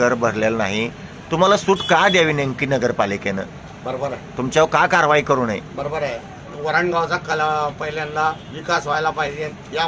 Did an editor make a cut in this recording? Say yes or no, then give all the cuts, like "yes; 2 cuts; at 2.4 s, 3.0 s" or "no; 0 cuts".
no; 0 cuts